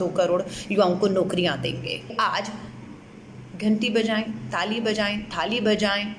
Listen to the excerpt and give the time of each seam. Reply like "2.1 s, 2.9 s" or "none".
2.1 s